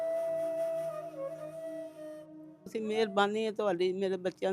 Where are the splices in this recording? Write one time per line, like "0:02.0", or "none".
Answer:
0:02.6